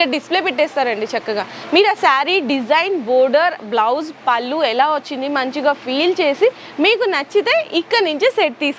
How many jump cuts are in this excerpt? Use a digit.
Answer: 0